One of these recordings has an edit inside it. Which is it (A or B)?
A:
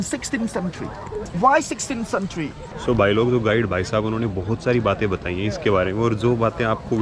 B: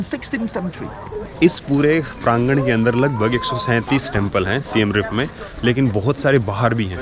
B